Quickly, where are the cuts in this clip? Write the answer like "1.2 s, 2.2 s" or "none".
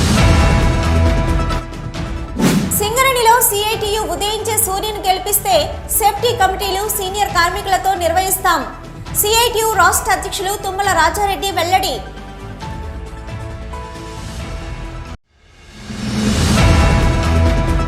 none